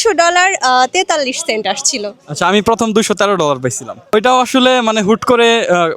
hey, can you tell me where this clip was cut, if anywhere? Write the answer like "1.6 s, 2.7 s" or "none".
4.1 s

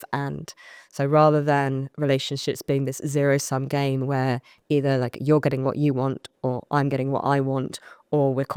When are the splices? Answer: none

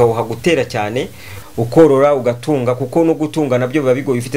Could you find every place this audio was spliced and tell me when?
1.3 s

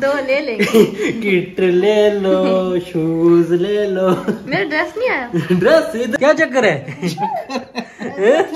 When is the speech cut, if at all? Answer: 6.1 s

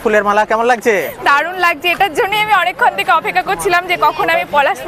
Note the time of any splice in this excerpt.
none

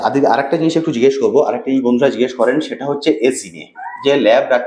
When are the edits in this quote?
none

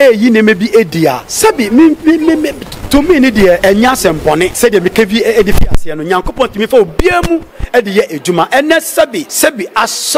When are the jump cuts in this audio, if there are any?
1.3 s, 3.6 s, 4.5 s, 9.2 s

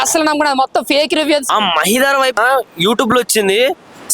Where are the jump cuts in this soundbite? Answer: 1.4 s, 2.4 s

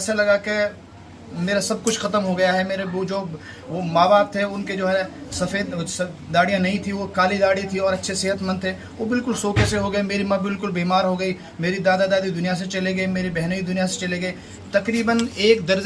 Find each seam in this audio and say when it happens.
none

